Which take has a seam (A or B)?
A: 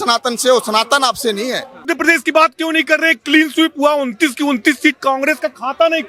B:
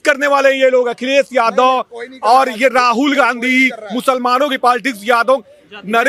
A